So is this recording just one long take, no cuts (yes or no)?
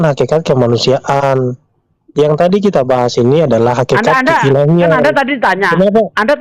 yes